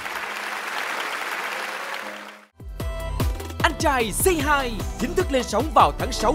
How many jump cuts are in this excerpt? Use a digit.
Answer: 1